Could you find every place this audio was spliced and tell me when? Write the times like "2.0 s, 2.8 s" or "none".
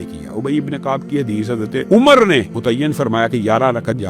1.9 s, 2.5 s